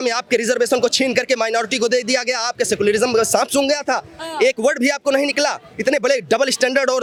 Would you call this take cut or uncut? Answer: uncut